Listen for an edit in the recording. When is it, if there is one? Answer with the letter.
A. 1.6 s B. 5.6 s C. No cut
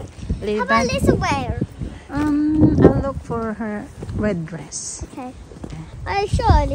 C